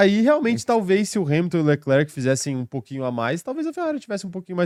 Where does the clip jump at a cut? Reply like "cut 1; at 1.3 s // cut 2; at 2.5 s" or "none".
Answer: none